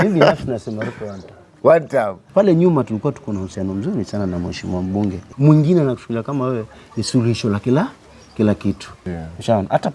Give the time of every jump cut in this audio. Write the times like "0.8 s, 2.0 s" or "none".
2.3 s, 5.3 s, 8.9 s